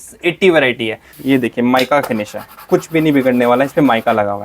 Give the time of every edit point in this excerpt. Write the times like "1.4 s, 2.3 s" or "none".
1.1 s